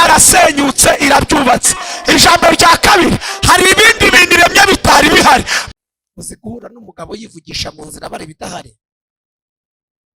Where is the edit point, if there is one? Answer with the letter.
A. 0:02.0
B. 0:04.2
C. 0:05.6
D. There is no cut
C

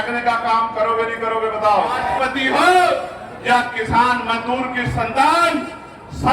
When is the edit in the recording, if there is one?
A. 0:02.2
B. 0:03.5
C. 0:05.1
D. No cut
A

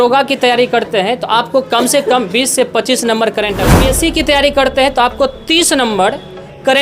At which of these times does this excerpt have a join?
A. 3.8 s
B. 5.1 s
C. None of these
A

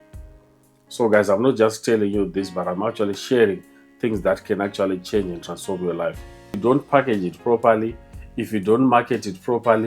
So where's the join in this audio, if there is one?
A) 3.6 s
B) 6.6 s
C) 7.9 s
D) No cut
B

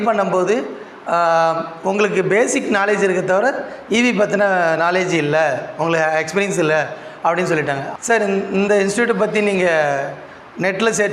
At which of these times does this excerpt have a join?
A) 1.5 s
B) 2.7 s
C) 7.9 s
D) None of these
C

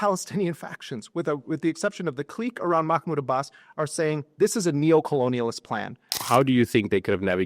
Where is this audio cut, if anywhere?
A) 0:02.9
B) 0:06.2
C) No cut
B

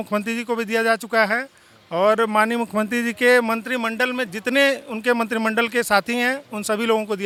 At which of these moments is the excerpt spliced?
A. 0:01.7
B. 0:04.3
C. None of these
C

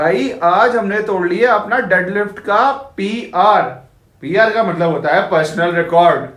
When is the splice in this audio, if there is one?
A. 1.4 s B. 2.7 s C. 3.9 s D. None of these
D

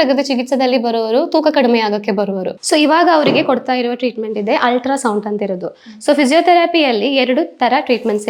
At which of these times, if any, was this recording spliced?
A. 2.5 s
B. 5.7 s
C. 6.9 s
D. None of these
A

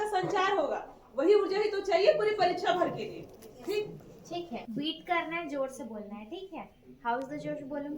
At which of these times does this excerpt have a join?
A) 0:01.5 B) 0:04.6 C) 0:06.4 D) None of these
B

